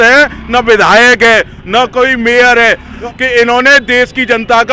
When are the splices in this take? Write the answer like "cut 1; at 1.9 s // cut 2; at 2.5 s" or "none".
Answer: cut 1; at 3.0 s